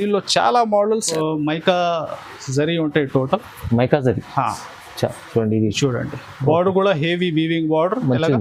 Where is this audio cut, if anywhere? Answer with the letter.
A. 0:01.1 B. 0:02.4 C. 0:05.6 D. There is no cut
A